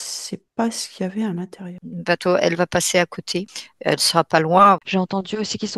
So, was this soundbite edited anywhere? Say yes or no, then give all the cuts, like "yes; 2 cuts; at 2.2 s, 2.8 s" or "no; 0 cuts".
yes; 2 cuts; at 1.7 s, 4.8 s